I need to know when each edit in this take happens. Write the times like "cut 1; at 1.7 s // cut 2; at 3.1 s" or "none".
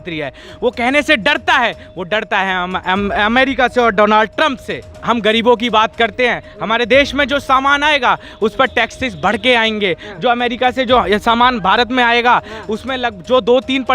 cut 1; at 4.9 s

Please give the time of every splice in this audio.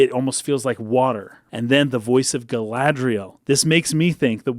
cut 1; at 1.4 s // cut 2; at 3.3 s

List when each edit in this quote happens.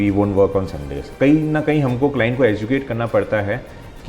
cut 1; at 1.1 s

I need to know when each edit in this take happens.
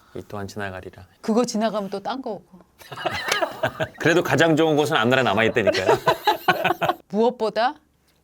cut 1; at 3.9 s // cut 2; at 7.0 s

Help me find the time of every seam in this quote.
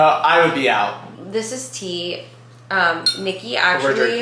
cut 1; at 1.1 s

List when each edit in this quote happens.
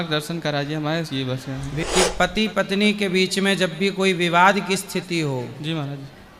cut 1; at 1.8 s

